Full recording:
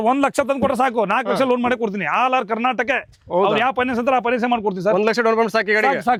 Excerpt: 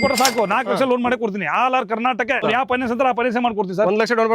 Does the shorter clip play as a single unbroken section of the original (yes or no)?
no